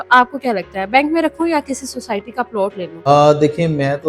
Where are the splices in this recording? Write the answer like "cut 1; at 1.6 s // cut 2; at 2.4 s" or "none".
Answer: cut 1; at 3.1 s